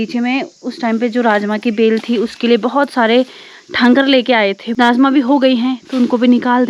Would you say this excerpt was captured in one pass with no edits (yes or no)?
no